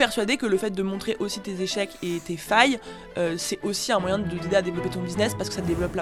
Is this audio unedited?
yes; 0 cuts

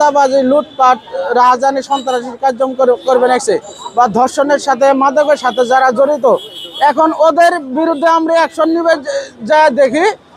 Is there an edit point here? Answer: no; 0 cuts

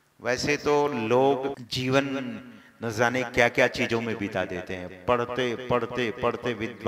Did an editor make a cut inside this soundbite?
yes; 1 cut; at 1.6 s

